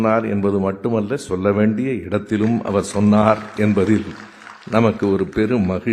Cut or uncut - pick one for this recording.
uncut